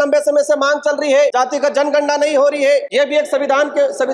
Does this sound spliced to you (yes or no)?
yes